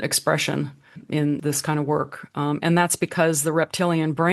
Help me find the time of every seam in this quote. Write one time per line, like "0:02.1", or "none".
0:01.3